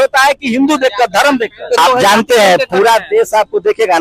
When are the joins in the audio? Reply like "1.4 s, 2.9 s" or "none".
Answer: 1.8 s